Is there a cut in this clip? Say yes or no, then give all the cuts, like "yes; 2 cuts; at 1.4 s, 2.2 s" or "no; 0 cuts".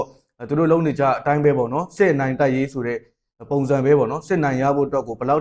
no; 0 cuts